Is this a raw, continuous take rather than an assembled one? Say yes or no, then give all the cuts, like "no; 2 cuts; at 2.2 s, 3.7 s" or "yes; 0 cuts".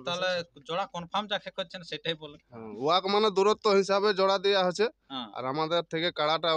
yes; 0 cuts